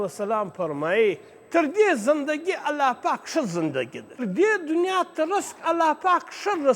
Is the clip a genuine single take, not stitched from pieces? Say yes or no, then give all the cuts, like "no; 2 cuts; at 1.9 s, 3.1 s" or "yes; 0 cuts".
no; 1 cut; at 4.2 s